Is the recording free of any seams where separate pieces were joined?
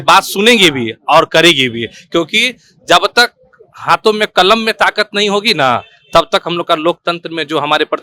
yes; 0 cuts

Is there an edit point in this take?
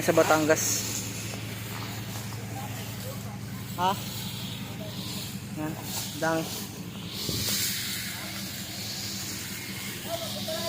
no; 0 cuts

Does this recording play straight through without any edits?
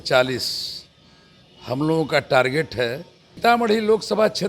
no; 1 cut; at 3.4 s

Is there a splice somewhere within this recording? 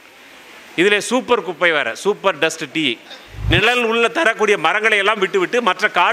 yes; 1 cut; at 3.3 s

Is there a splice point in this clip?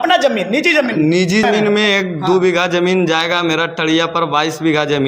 yes; 1 cut; at 1.4 s

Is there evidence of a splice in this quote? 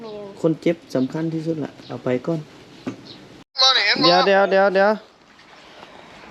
yes; 1 cut; at 3.5 s

